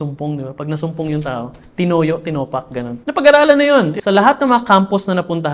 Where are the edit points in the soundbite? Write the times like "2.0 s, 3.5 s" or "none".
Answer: 3.0 s, 3.9 s